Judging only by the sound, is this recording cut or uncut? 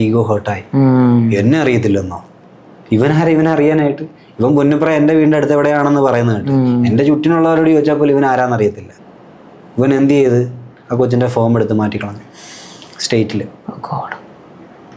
uncut